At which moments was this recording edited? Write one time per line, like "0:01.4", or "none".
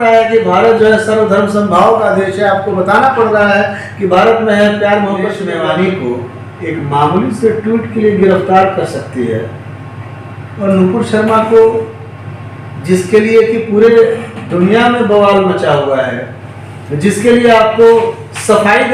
0:05.4

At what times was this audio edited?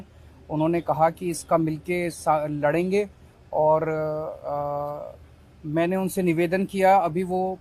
none

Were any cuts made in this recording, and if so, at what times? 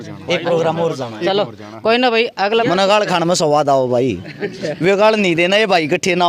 0:02.6

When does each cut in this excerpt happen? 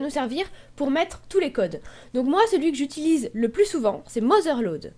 0:04.0

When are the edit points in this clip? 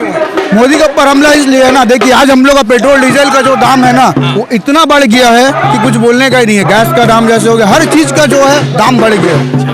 none

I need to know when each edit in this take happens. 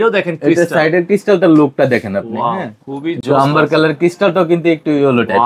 none

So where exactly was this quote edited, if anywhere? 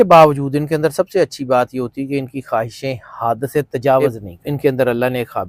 0:04.0

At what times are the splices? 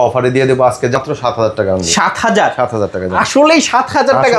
0:01.0

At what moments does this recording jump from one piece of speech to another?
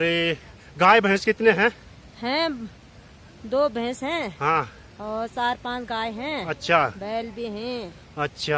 none

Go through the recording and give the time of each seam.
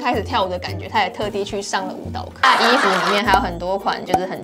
0:02.4

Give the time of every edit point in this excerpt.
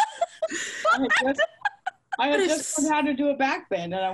none

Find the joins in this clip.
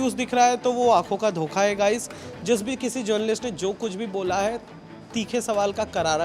none

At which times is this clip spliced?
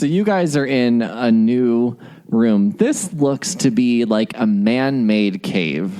none

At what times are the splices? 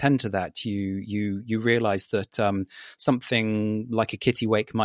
none

